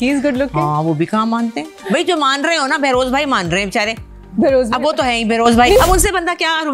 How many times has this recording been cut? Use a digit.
2